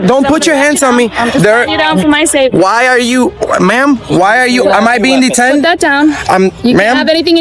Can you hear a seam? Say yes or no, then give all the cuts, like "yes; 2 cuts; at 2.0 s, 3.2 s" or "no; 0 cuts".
no; 0 cuts